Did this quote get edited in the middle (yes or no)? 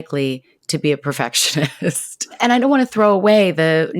yes